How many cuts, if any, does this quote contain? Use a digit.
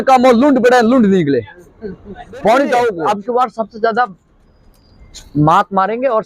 1